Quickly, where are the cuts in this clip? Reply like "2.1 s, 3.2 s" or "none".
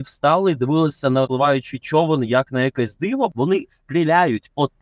1.3 s, 3.3 s